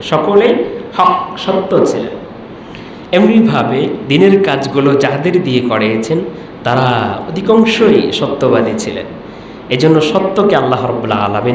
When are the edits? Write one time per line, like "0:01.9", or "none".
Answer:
none